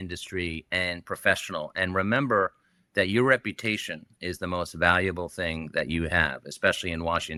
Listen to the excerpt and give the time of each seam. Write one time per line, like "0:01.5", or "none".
none